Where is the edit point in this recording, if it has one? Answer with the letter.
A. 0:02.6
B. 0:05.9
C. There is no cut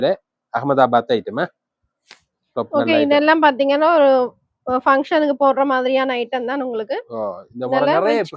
C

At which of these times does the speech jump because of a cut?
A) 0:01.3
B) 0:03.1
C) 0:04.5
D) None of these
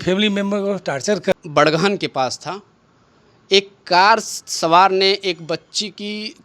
A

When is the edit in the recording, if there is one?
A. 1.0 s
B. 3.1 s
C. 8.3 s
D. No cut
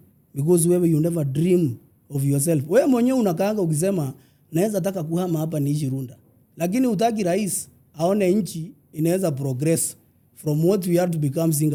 D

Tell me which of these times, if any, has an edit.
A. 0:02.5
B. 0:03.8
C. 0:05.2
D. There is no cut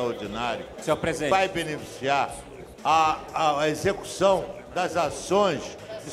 D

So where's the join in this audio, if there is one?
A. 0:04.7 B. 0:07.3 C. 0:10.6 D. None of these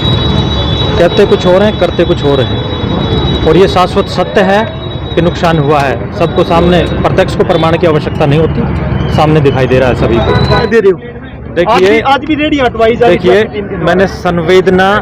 C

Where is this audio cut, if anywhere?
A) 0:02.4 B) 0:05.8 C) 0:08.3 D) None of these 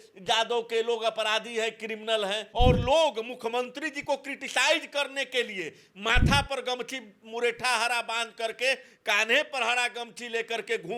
A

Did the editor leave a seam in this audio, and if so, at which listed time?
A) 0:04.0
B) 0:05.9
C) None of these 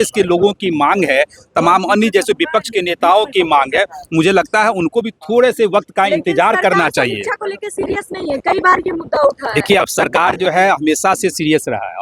C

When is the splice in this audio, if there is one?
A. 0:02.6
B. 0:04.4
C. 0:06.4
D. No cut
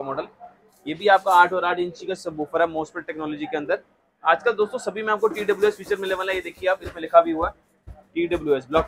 D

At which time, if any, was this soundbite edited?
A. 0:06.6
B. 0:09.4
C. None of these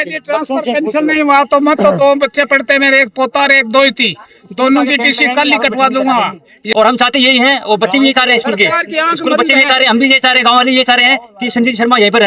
A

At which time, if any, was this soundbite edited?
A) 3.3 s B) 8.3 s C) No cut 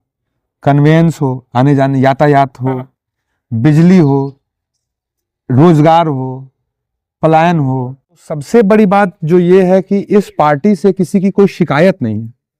B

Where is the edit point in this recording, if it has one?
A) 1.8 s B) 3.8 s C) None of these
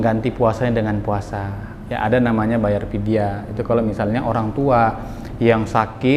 C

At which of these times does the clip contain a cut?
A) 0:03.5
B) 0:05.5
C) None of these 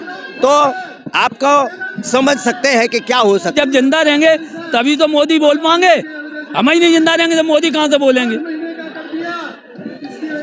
A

